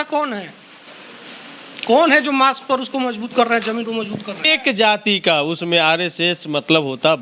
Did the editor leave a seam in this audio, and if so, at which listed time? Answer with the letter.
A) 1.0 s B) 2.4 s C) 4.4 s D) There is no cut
C